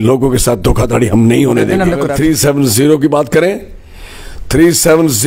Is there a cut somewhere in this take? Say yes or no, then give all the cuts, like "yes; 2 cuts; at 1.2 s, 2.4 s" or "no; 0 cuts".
yes; 1 cut; at 2.1 s